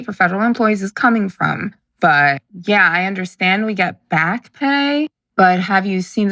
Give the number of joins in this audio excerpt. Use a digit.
0